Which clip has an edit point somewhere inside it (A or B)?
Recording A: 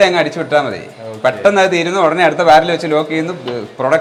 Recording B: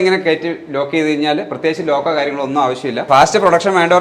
B